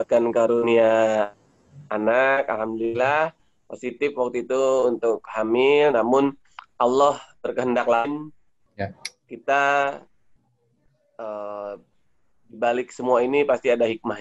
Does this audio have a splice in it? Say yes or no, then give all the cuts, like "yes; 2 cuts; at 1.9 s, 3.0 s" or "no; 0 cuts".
no; 0 cuts